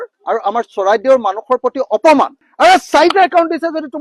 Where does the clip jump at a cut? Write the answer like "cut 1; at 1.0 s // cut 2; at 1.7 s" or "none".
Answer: cut 1; at 2.4 s